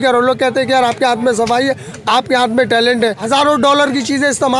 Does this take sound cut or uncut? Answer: cut